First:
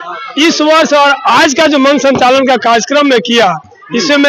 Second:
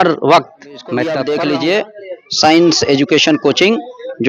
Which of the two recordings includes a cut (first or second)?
second